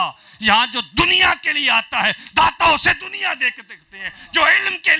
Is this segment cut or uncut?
uncut